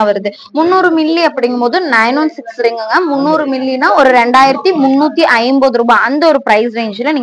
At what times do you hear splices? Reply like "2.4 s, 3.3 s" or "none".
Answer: none